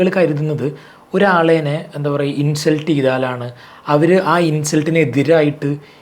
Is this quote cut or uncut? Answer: uncut